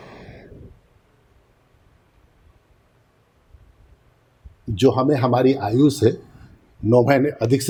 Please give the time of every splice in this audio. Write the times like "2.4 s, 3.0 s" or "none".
none